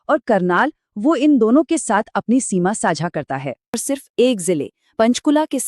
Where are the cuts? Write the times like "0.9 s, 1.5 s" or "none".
3.8 s